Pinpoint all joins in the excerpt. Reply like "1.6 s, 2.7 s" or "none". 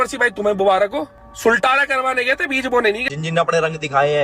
1.2 s, 3.0 s